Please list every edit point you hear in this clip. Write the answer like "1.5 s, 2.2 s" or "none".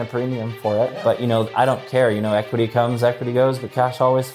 none